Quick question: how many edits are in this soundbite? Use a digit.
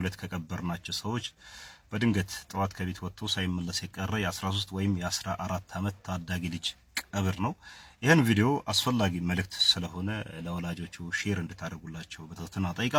0